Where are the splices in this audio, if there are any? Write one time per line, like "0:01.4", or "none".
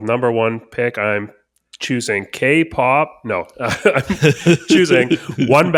none